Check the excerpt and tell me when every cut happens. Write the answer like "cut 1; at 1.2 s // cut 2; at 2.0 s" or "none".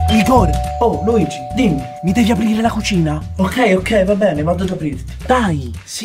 cut 1; at 5.1 s